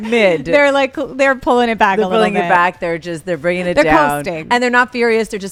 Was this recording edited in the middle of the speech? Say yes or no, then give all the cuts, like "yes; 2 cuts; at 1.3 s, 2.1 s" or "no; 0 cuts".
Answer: no; 0 cuts